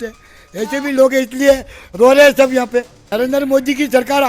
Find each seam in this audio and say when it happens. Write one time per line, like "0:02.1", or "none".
0:03.0